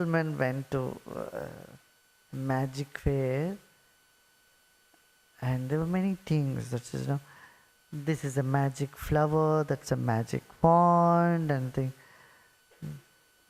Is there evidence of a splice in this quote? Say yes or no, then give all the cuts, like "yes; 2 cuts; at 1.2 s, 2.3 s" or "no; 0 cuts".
no; 0 cuts